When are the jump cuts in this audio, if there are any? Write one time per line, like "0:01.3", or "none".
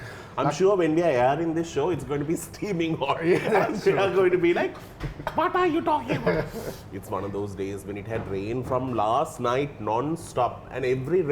none